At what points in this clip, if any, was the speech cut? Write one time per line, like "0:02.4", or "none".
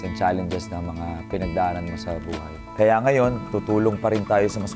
0:02.6